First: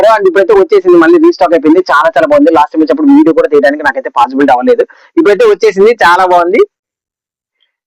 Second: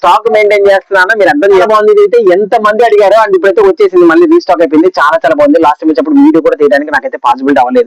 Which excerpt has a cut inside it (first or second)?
second